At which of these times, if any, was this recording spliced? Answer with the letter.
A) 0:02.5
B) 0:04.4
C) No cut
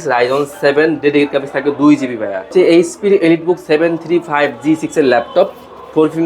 A